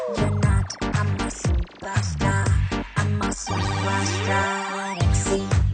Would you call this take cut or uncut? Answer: uncut